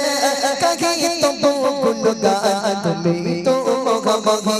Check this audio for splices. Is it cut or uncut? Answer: uncut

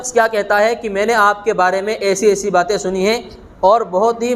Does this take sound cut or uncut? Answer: uncut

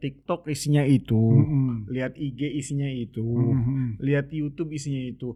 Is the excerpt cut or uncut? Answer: uncut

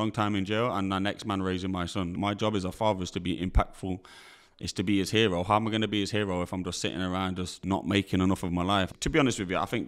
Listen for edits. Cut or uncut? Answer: cut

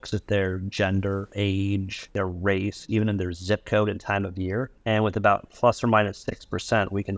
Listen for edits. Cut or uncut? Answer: cut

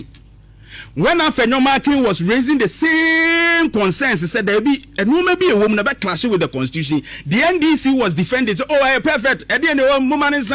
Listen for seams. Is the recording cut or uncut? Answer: uncut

